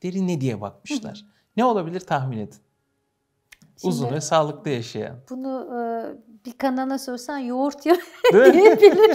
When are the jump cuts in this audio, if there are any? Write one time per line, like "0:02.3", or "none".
none